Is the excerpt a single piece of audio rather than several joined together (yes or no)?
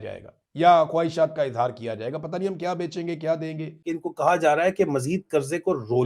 no